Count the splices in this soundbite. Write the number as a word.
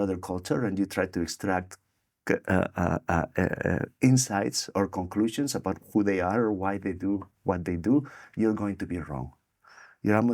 zero